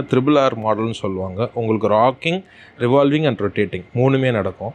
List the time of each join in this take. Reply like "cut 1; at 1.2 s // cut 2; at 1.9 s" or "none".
none